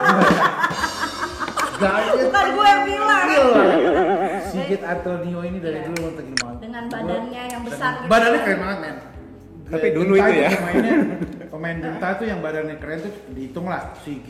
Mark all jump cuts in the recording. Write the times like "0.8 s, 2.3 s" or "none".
none